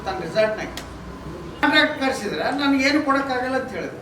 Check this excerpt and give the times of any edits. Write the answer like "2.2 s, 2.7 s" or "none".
1.6 s